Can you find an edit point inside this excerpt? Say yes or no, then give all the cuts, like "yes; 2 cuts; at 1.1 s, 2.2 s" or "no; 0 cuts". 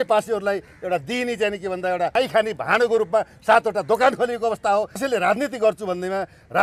yes; 2 cuts; at 2.1 s, 5.0 s